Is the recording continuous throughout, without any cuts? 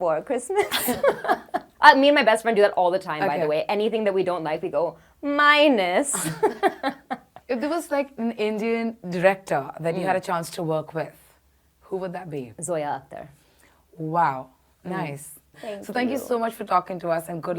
yes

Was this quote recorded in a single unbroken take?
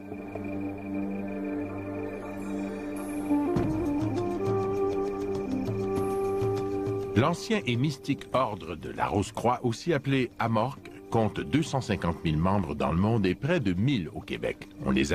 no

